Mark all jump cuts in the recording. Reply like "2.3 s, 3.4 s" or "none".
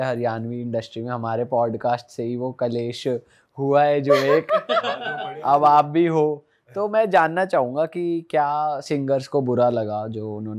5.3 s